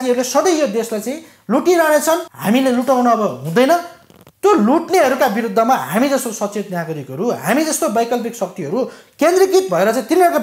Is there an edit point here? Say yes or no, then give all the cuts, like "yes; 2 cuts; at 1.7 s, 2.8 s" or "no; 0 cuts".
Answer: yes; 1 cut; at 2.3 s